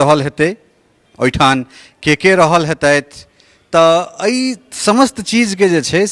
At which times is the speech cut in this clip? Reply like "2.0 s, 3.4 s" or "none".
none